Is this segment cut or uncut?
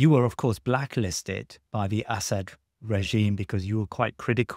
uncut